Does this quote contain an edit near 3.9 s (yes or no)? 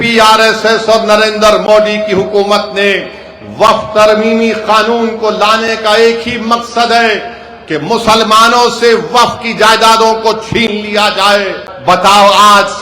no